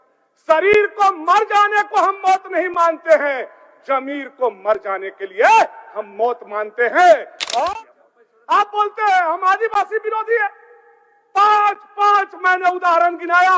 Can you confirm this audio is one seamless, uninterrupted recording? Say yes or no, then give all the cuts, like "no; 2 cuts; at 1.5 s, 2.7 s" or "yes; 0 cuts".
no; 1 cut; at 7.6 s